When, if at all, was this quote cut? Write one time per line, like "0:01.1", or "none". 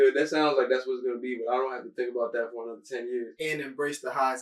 0:03.3